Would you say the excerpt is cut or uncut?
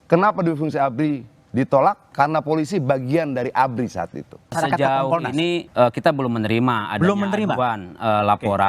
cut